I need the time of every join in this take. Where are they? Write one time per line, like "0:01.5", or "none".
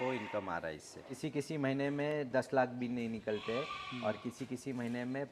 0:01.1